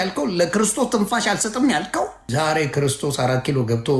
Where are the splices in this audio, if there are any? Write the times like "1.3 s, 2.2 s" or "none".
2.2 s